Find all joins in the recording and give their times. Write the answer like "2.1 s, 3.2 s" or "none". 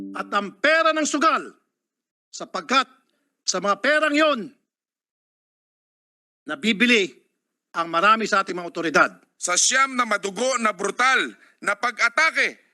9.3 s